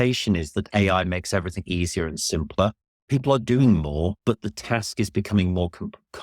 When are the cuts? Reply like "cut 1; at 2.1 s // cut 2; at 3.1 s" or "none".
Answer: cut 1; at 2.9 s // cut 2; at 4.2 s